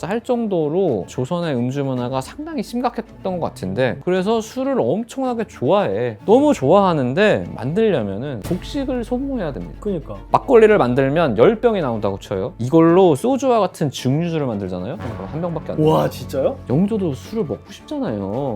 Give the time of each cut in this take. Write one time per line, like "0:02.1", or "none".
0:04.0
0:10.2
0:16.6